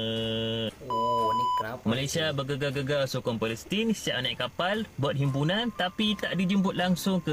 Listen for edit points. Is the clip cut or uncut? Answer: uncut